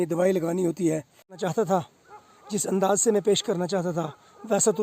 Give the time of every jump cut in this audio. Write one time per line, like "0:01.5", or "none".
0:01.4